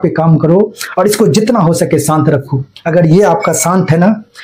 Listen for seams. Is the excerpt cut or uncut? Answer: uncut